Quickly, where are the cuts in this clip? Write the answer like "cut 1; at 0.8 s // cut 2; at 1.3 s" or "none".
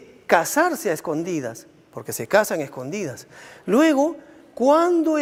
none